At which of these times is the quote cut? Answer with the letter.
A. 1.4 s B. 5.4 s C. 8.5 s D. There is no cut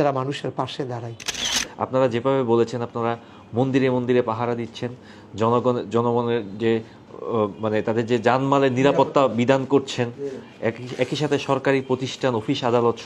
A